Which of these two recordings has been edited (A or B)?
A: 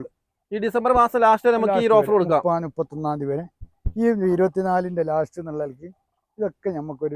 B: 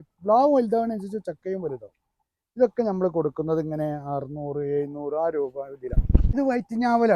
B